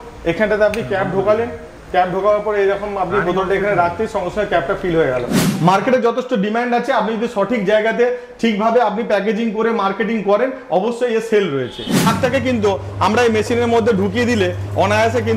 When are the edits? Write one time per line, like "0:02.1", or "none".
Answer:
0:05.4
0:12.1

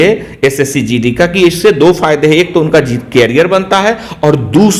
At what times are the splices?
none

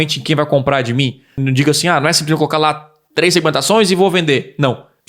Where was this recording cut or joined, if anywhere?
0:01.4

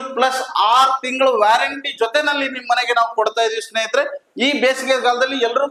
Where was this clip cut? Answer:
0:04.2

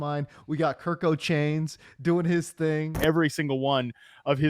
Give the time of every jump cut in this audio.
0:03.0

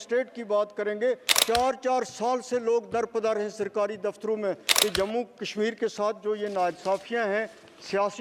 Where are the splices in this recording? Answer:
0:01.3
0:04.7

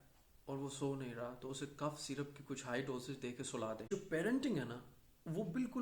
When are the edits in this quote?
0:03.8

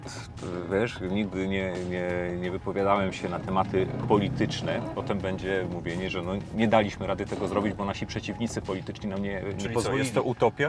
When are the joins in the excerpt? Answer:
0:05.0

